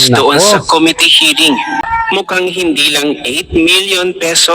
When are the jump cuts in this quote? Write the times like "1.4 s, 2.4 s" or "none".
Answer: 1.8 s

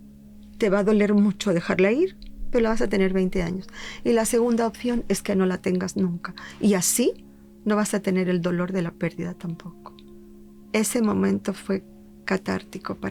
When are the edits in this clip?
none

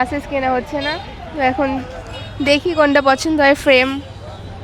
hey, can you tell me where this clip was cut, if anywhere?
none

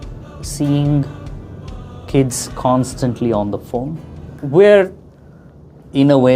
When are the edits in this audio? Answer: 4.4 s

